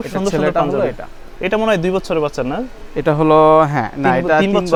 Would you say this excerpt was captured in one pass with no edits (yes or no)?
yes